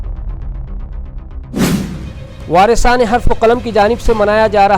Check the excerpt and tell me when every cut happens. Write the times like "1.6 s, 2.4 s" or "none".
2.2 s